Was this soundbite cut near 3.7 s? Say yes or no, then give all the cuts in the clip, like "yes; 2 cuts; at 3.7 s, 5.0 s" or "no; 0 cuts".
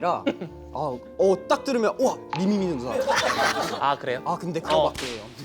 yes; 1 cut; at 3.7 s